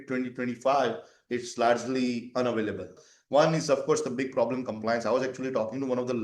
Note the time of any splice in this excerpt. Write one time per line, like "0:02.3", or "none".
0:03.0